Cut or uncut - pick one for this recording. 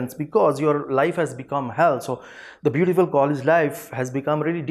uncut